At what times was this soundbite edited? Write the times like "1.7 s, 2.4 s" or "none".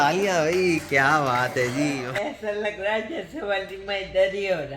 2.1 s